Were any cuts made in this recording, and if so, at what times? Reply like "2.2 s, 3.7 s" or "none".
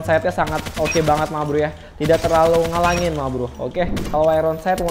4.0 s